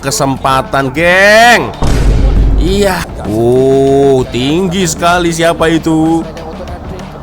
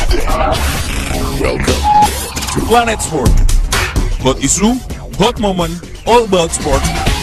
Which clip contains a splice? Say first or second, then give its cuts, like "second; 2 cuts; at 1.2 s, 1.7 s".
first; 1 cut; at 3.1 s